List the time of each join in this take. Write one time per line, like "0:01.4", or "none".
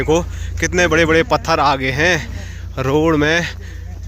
none